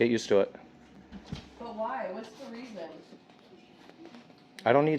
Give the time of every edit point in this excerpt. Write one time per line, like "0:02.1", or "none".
none

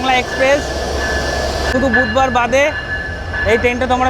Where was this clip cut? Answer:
0:01.7

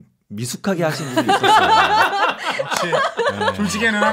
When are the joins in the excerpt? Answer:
none

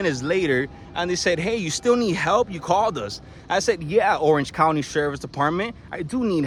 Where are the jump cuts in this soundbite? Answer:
none

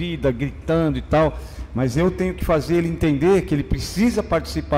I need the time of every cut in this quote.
none

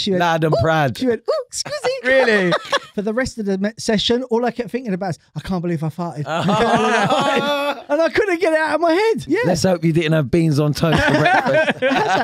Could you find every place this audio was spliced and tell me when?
0:02.8
0:09.2

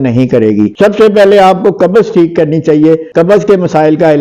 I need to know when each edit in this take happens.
none

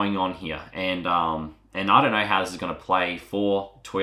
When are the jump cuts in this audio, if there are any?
none

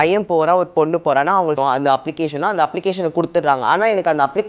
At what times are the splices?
0:01.6

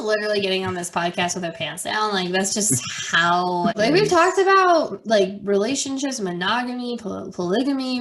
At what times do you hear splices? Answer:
0:03.7

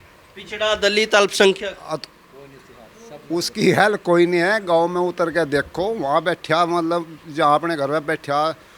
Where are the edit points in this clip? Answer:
none

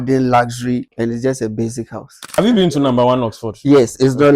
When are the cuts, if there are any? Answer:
0:00.9
0:02.3

